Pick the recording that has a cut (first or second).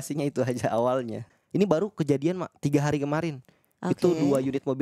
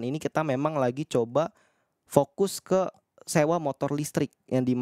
first